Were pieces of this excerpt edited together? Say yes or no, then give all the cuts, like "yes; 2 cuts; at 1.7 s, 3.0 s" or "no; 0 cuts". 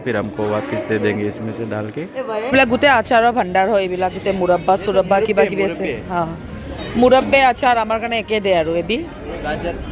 yes; 1 cut; at 2.4 s